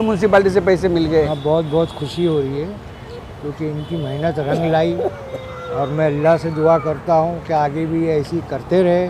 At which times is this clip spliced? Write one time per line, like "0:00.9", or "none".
0:01.4